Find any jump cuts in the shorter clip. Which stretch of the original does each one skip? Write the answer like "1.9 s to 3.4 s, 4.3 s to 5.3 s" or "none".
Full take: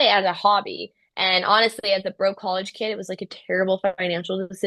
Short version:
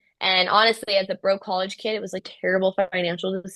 3.2 s to 3.3 s